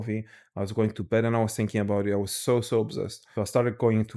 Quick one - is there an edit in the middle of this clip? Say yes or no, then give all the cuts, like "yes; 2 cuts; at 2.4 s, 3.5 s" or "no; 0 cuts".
yes; 1 cut; at 3.2 s